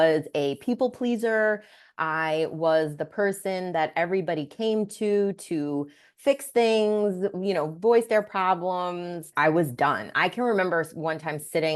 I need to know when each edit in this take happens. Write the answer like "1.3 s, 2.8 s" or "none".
9.3 s